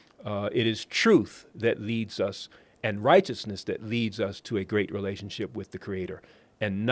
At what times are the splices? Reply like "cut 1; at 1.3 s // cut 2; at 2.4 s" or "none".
none